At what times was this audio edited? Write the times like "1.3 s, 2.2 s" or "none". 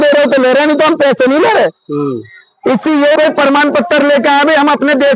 3.2 s